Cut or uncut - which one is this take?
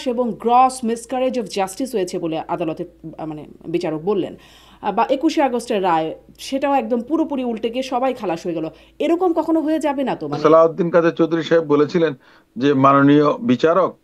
cut